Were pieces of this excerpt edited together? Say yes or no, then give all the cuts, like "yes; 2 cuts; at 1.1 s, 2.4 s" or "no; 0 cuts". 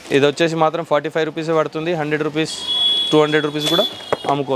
no; 0 cuts